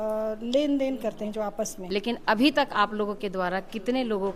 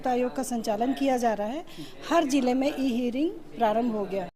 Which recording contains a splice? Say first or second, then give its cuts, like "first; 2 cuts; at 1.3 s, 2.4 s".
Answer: first; 1 cut; at 1.8 s